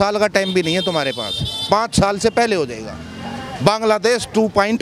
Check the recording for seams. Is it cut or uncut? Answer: uncut